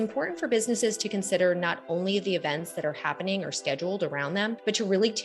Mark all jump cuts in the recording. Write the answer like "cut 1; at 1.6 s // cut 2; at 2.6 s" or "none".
none